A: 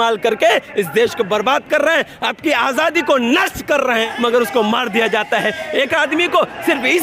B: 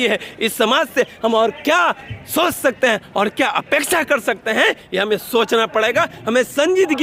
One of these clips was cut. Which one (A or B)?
A